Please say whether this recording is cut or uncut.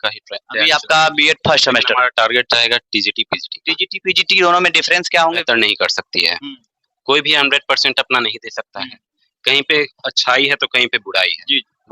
cut